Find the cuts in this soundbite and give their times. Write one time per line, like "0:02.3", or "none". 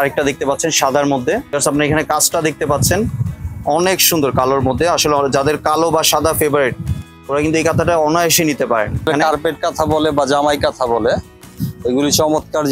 0:01.5
0:09.1